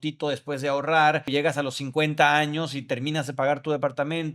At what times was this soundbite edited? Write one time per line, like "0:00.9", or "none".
0:01.3